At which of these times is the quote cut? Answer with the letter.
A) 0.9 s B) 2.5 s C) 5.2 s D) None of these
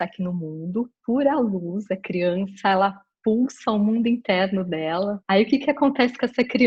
C